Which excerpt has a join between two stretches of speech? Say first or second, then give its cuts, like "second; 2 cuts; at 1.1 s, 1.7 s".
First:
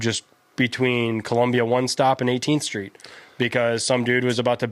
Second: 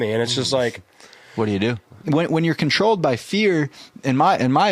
second; 1 cut; at 2.0 s